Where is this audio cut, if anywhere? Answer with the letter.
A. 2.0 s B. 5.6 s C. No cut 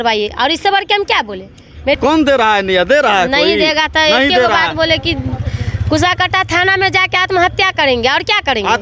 A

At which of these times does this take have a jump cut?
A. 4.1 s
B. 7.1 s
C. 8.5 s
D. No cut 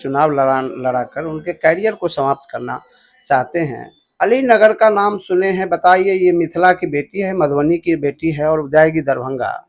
A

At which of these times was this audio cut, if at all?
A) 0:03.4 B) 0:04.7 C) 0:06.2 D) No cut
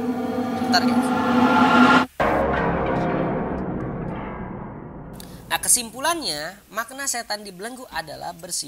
B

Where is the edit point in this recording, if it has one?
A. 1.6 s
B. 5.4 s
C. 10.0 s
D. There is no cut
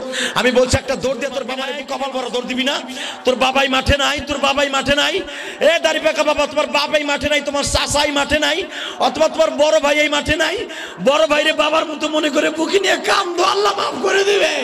A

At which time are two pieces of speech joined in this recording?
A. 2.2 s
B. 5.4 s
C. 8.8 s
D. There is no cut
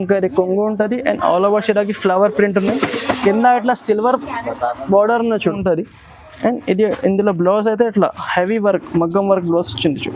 B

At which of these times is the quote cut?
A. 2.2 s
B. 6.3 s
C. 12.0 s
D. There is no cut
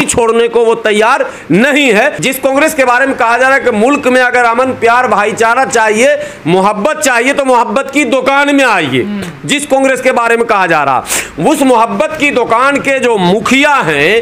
A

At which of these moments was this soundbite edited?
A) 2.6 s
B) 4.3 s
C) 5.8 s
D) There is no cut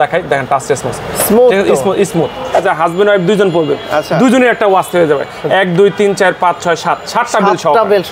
A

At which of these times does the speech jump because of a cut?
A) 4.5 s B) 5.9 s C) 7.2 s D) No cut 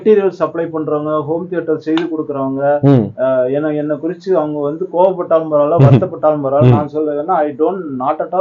D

